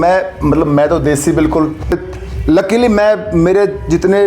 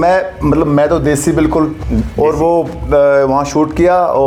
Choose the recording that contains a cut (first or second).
first